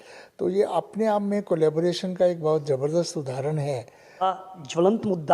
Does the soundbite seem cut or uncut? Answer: cut